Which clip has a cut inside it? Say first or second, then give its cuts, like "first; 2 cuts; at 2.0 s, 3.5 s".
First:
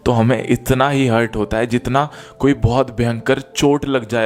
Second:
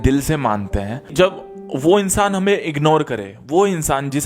second; 1 cut; at 1.0 s